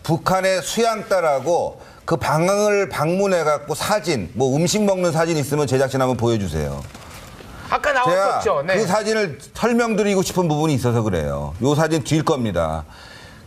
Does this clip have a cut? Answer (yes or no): no